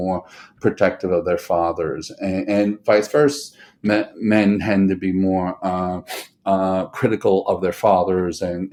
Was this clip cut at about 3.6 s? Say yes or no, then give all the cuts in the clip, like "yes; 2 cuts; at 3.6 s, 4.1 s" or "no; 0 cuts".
no; 0 cuts